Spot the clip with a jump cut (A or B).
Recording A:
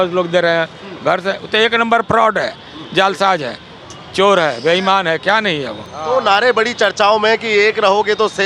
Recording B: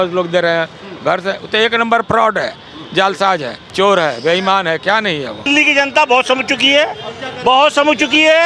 B